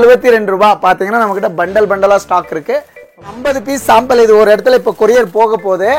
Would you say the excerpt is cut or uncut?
cut